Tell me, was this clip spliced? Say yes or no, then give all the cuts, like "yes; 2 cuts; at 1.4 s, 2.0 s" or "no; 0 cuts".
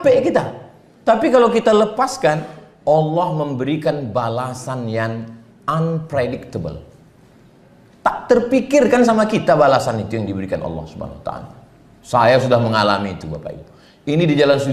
no; 0 cuts